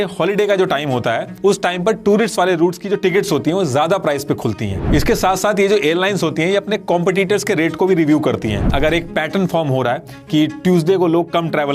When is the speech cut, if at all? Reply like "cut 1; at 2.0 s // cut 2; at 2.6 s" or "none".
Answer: cut 1; at 4.8 s // cut 2; at 8.7 s